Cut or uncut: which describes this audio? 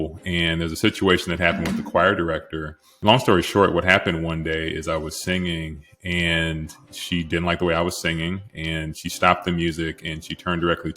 cut